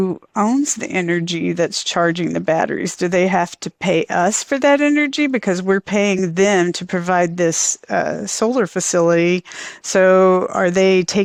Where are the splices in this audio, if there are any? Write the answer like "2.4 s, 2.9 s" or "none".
none

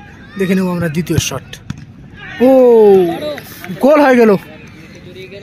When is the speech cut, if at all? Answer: 0.9 s, 2.7 s

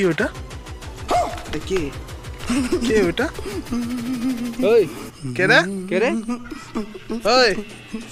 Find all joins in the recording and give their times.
none

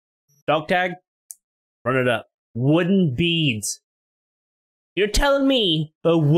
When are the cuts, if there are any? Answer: 2.4 s

